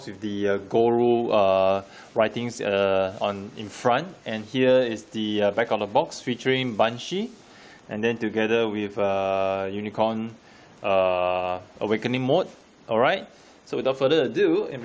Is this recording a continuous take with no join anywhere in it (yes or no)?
no